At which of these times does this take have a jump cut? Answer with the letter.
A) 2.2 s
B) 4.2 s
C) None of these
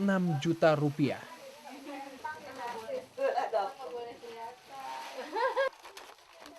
A